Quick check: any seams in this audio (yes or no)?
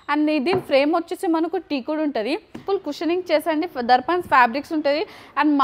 yes